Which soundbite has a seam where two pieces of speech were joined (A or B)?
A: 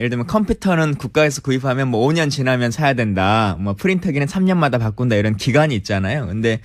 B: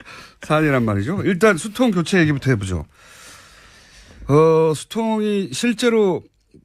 B